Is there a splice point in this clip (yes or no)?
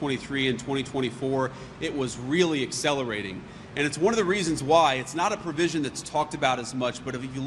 no